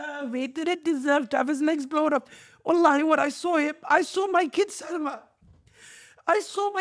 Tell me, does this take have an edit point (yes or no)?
no